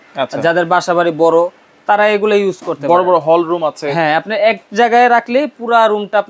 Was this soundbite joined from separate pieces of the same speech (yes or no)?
no